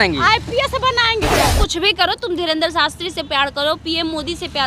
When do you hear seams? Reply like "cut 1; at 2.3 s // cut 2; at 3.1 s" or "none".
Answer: cut 1; at 1.5 s